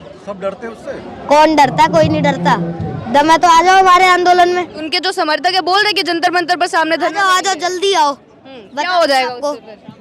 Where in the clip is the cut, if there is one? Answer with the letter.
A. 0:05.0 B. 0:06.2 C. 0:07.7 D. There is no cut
A